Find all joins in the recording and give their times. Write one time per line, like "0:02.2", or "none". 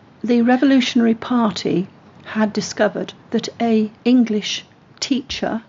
0:03.9